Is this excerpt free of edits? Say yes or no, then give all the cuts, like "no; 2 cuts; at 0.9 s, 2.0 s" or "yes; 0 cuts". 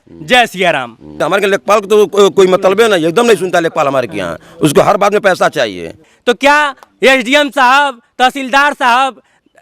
no; 2 cuts; at 1.2 s, 6.1 s